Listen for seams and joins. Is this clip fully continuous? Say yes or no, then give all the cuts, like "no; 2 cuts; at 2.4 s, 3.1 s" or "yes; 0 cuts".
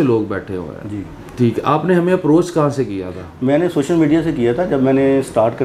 yes; 0 cuts